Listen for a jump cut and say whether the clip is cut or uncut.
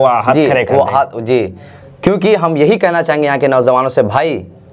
uncut